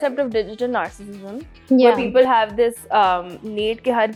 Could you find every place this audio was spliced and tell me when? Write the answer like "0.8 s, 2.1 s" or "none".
none

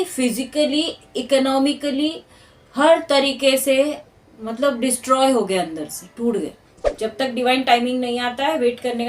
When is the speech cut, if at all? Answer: 6.8 s

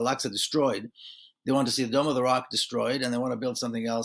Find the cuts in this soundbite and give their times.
none

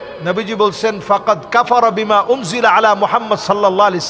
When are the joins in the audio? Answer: none

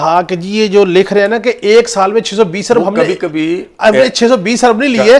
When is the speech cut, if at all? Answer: none

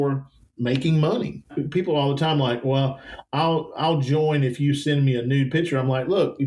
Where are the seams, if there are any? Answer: 1.5 s

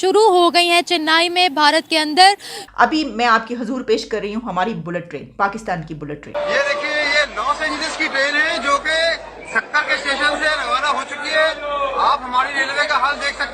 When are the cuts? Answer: 2.5 s, 6.3 s

